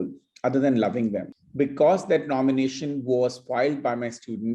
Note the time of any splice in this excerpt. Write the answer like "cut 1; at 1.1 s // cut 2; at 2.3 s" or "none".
cut 1; at 1.3 s